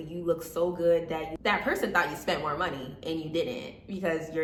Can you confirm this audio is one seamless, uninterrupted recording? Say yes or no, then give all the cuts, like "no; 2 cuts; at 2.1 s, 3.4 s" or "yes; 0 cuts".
yes; 0 cuts